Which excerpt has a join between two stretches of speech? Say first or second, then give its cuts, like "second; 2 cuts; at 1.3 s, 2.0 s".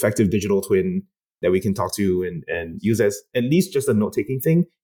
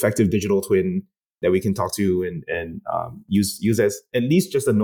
first; 1 cut; at 2.8 s